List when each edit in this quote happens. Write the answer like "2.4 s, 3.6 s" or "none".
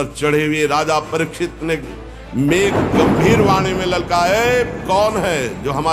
none